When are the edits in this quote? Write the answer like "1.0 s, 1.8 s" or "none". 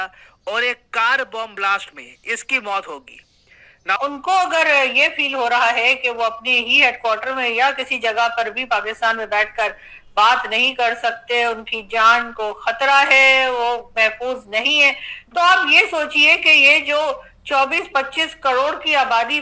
4.0 s